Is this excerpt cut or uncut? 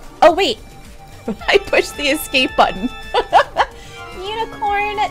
uncut